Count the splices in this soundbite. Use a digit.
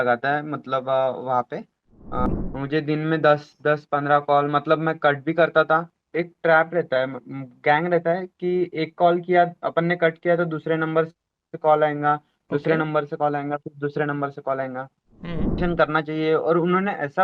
2